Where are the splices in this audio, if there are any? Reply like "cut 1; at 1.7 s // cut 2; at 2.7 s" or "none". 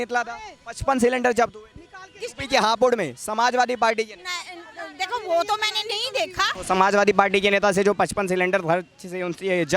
cut 1; at 6.6 s

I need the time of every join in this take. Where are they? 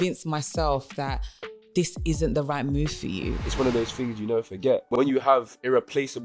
cut 1; at 3.4 s // cut 2; at 4.9 s

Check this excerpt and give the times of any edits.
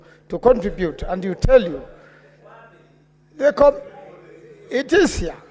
none

